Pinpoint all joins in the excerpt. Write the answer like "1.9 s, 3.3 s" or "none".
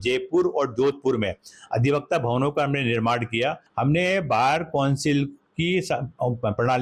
3.7 s